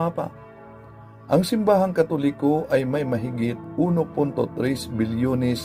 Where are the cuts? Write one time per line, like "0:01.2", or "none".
0:02.8